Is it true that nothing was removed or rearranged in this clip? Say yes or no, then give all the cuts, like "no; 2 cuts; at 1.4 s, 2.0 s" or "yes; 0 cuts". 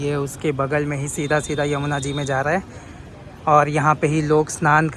yes; 0 cuts